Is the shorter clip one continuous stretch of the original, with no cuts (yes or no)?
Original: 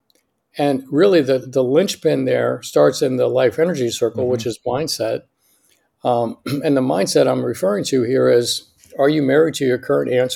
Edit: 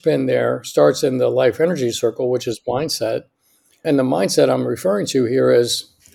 no